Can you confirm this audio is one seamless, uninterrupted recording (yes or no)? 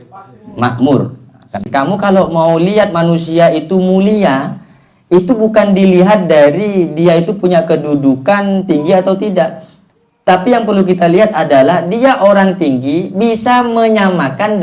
no